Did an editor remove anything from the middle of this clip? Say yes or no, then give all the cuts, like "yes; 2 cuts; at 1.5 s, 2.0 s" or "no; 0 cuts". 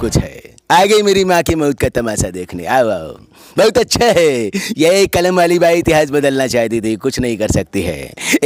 no; 0 cuts